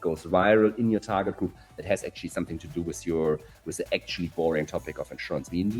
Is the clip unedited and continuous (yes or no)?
yes